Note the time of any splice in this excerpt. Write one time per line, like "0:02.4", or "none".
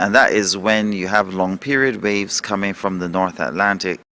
0:03.0